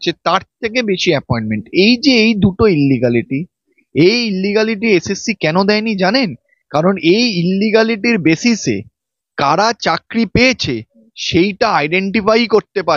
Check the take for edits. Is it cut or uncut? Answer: uncut